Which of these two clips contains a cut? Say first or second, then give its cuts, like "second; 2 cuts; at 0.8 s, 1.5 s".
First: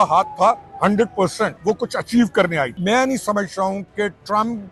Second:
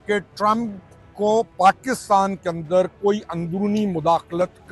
first; 2 cuts; at 1.6 s, 2.8 s